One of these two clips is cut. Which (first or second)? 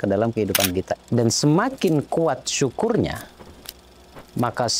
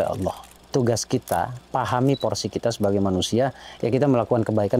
first